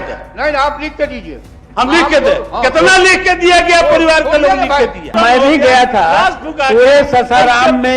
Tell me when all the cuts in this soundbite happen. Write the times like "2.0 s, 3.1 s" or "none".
5.1 s